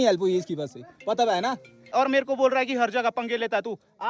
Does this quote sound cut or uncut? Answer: cut